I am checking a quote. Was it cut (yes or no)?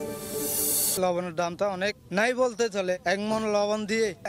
yes